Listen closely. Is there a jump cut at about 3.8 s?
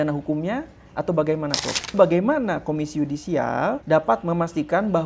yes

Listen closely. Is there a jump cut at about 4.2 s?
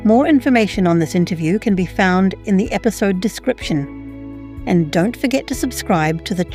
no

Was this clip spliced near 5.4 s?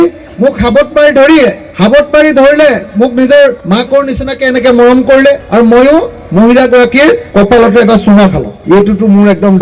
yes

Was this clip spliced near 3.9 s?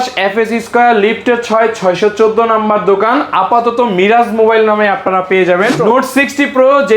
no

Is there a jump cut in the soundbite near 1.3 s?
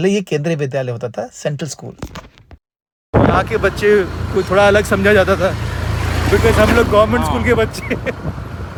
no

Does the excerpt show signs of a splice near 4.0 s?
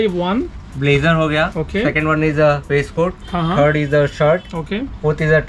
no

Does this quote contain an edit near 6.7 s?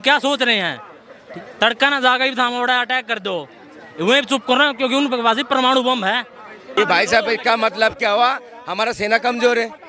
yes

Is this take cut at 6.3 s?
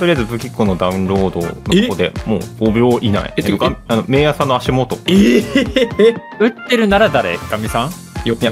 yes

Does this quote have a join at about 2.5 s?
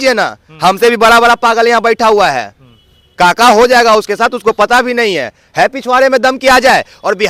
no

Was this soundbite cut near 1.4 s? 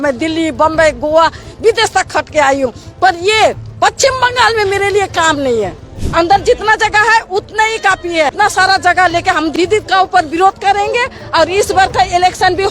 no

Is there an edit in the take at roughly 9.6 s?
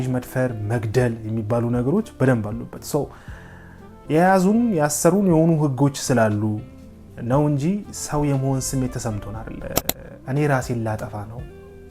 yes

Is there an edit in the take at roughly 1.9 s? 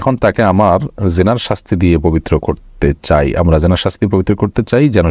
no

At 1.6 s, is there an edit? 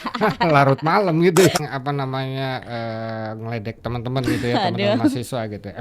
yes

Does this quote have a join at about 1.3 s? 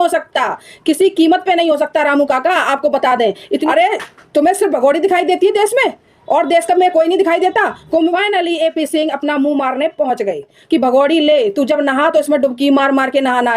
no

